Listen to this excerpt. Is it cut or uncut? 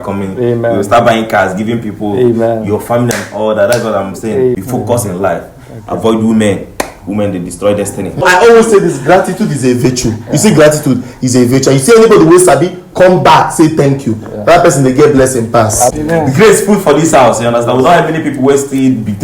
cut